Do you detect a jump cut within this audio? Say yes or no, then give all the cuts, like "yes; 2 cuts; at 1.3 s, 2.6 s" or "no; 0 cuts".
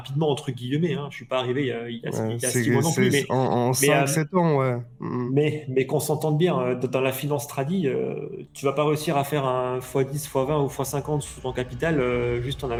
no; 0 cuts